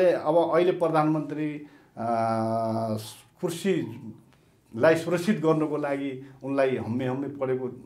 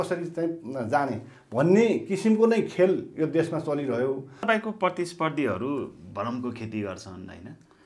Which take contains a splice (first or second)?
second